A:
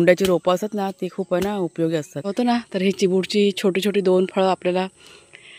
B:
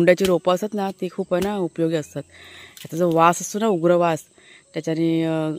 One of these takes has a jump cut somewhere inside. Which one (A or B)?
A